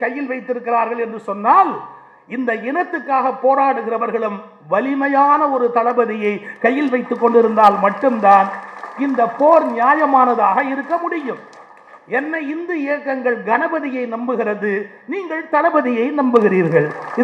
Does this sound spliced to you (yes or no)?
no